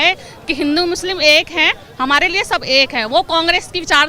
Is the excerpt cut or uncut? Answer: uncut